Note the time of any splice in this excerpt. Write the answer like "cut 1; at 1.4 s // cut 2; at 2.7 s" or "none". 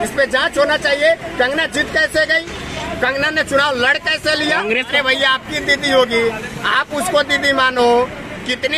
cut 1; at 4.9 s